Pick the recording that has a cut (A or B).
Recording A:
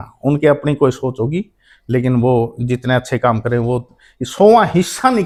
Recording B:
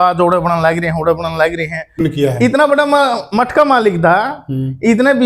B